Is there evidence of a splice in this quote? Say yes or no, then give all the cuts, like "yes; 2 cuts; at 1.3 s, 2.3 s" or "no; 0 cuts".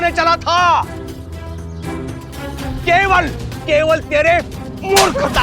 yes; 1 cut; at 2.8 s